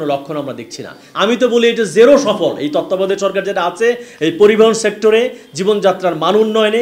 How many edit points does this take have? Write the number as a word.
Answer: one